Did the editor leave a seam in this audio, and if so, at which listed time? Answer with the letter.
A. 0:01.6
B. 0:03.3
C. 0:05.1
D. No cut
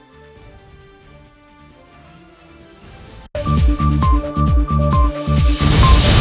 B